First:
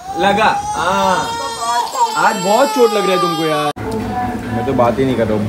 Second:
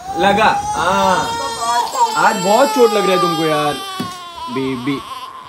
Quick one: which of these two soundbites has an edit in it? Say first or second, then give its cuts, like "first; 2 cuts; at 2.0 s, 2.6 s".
first; 1 cut; at 3.8 s